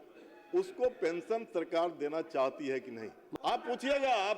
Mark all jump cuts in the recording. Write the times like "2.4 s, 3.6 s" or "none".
3.2 s